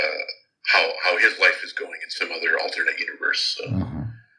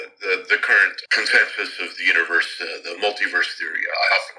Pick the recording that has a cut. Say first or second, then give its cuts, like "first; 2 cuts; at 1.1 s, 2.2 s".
second; 1 cut; at 1.0 s